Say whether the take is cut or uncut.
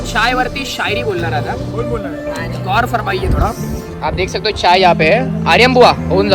uncut